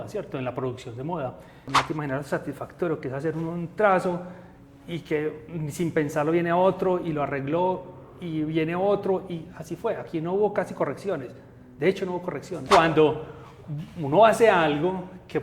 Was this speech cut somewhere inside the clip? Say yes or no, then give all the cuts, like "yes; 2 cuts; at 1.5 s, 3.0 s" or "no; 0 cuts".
yes; 2 cuts; at 1.6 s, 12.6 s